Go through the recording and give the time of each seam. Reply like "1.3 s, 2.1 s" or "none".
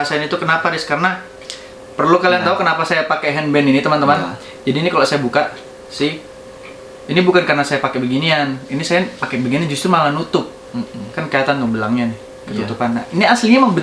none

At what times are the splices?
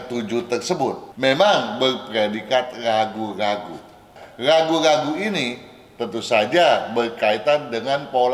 1.1 s, 4.2 s

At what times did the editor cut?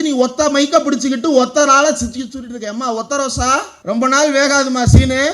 3.7 s

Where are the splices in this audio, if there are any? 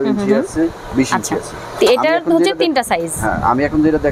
none

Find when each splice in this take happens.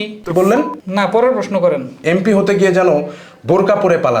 2.0 s

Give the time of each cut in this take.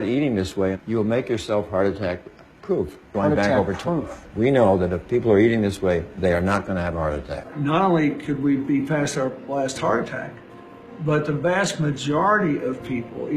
7.4 s

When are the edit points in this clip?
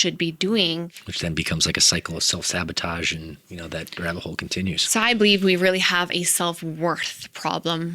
1.0 s

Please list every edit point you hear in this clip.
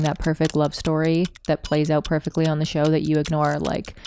none

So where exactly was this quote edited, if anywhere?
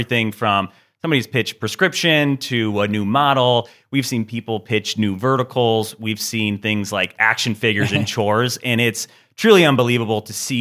none

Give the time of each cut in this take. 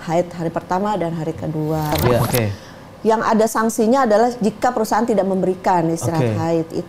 2.3 s

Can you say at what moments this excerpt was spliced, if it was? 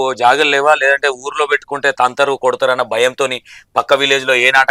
none

